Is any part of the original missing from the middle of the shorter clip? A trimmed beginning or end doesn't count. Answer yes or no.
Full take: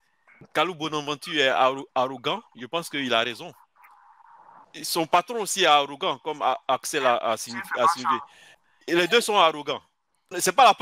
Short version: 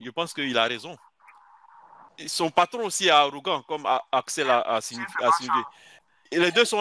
no